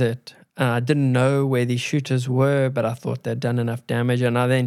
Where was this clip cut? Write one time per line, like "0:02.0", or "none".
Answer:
none